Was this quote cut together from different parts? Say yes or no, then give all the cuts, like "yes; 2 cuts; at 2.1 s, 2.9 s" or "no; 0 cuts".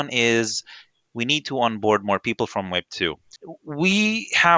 yes; 1 cut; at 3.3 s